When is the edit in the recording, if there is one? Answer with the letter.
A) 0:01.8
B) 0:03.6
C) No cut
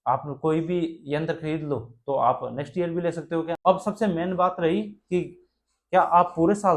B